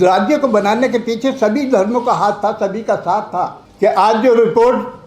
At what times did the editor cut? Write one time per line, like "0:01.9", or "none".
0:03.6